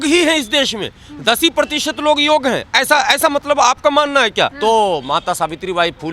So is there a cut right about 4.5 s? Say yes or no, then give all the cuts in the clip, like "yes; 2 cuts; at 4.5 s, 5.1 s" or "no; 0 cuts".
yes; 1 cut; at 4.5 s